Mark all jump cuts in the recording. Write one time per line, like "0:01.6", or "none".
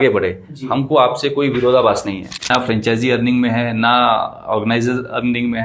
0:02.5